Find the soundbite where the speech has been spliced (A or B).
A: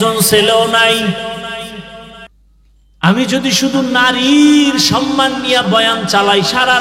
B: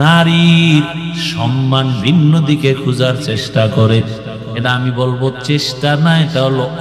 A